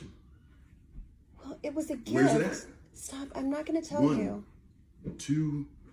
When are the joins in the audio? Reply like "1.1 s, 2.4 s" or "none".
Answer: none

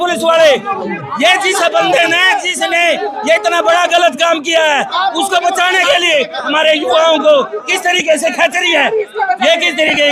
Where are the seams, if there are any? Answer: none

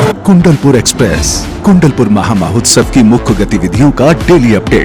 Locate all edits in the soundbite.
none

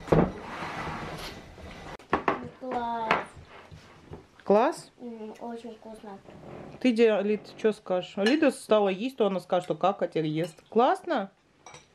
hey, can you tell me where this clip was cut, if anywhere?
6.2 s

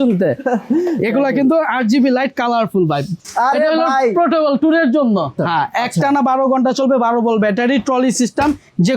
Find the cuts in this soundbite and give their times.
3.2 s, 5.4 s

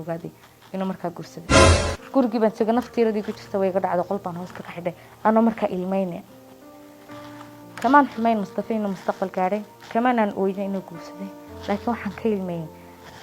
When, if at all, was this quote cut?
none

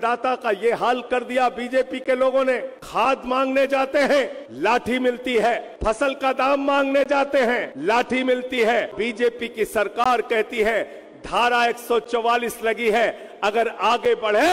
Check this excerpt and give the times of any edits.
2.8 s, 4.4 s, 5.7 s, 7.7 s, 8.9 s

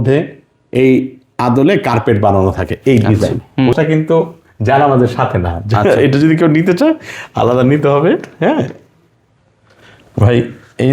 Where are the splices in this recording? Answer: 3.7 s

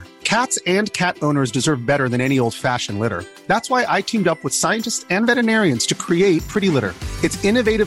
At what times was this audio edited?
none

